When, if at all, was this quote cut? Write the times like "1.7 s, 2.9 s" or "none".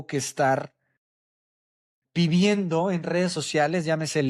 none